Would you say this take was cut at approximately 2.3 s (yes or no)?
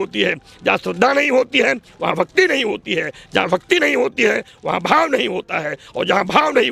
no